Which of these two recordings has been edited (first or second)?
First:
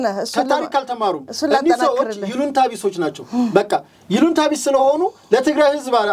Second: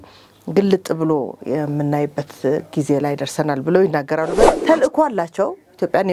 second